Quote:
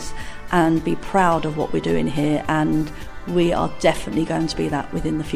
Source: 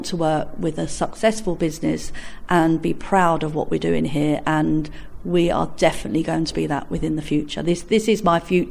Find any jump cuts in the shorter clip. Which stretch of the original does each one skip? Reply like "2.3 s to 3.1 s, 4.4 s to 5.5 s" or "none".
none

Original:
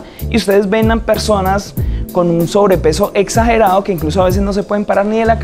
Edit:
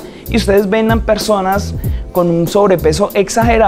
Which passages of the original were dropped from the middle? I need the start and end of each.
none

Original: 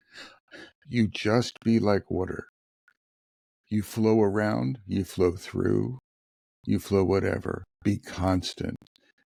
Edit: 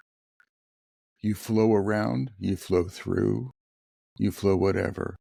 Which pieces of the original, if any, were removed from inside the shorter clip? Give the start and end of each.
none

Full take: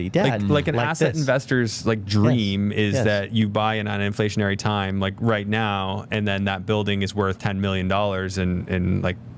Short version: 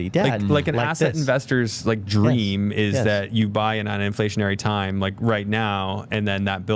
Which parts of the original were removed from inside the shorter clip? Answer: none

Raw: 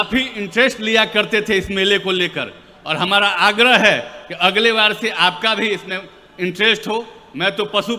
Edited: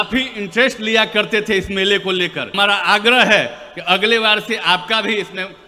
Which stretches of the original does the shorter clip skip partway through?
2.5 s to 3.1 s

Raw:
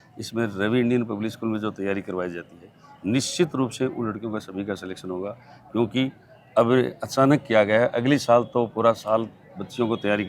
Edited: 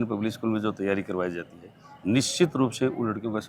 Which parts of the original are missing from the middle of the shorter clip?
none

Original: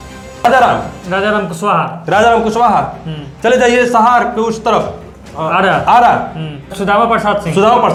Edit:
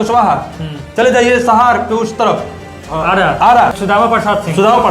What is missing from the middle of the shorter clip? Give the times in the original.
6.2 s to 6.8 s

